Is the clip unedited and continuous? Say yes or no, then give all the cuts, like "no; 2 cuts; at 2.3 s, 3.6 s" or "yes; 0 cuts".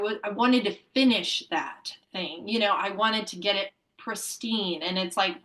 yes; 0 cuts